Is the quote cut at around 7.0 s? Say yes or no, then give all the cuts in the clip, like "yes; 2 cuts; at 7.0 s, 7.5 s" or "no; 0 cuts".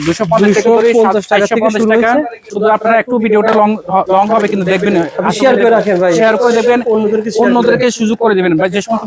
no; 1 cut; at 2.4 s